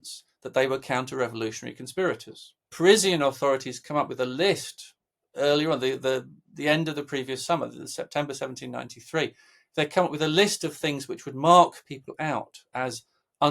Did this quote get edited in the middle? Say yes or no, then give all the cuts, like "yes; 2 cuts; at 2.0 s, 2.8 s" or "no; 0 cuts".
yes; 1 cut; at 2.7 s